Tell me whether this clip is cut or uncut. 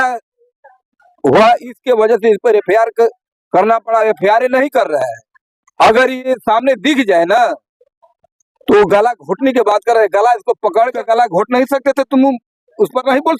cut